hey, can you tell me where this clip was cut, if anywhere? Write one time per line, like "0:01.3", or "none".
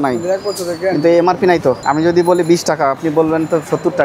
0:01.8